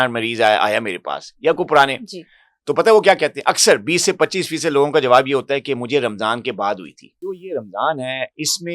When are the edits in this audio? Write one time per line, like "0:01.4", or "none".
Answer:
0:07.3